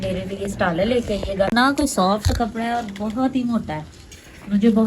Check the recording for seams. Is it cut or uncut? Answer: cut